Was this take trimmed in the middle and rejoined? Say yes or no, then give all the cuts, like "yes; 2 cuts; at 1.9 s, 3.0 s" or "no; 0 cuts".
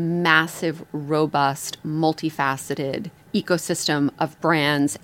yes; 1 cut; at 3.1 s